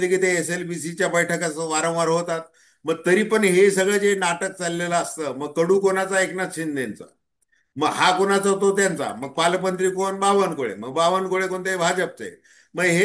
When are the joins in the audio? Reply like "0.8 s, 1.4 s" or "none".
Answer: none